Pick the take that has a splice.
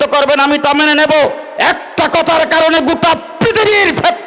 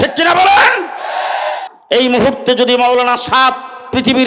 second; 1 cut; at 1.7 s

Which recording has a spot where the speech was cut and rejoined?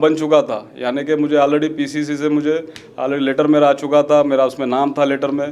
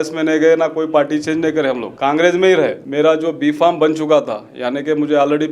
second; 2 cuts; at 1.9 s, 2.8 s

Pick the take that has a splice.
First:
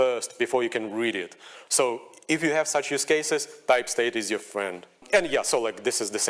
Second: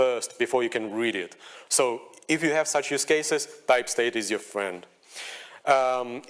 first; 1 cut; at 5.0 s

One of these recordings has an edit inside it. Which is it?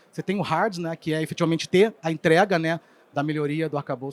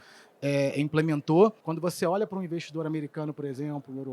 second; 1 cut; at 1.7 s

